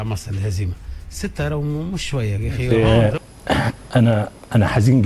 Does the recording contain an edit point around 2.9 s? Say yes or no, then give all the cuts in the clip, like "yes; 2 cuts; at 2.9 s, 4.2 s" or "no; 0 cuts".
yes; 1 cut; at 2.9 s